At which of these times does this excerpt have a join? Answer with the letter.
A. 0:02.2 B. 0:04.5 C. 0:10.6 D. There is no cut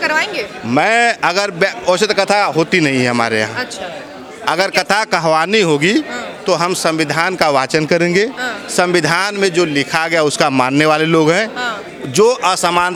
D